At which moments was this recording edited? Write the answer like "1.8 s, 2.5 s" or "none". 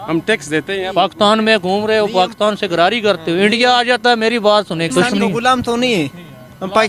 4.9 s